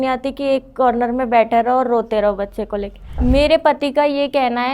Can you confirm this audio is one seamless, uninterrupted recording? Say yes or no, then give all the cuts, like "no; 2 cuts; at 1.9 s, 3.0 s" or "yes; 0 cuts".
no; 1 cut; at 3.2 s